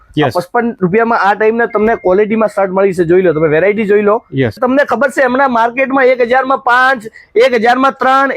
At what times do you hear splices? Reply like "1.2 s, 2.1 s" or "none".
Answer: 4.6 s